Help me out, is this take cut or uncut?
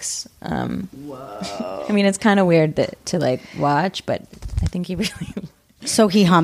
cut